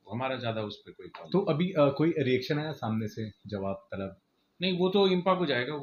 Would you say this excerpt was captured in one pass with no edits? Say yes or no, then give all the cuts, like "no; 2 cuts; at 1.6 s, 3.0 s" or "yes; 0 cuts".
yes; 0 cuts